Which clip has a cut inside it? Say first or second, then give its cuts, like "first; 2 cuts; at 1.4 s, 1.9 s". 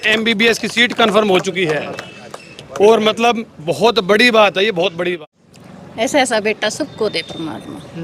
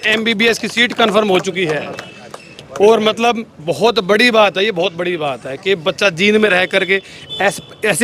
first; 1 cut; at 5.2 s